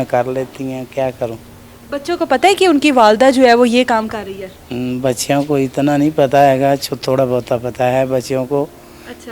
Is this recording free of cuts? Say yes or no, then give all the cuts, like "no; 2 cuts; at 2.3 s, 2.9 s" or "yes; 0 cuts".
yes; 0 cuts